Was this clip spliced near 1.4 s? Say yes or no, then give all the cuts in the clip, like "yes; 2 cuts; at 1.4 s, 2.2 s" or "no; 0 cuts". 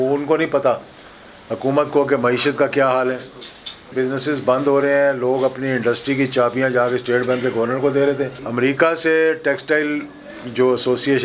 no; 2 cuts; at 3.9 s, 8.4 s